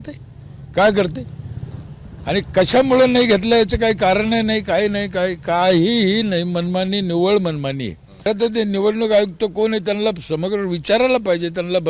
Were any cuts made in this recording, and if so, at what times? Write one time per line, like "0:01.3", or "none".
0:08.3